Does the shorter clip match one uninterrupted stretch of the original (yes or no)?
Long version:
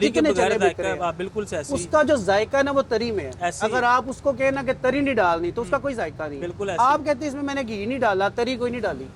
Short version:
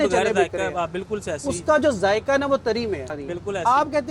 no